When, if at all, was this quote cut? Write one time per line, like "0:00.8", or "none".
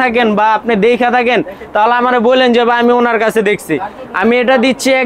none